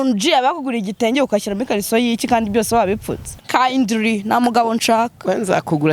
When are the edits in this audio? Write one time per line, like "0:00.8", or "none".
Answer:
0:03.4